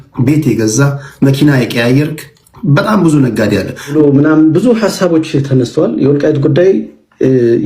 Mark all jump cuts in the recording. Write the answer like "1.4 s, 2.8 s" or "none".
3.9 s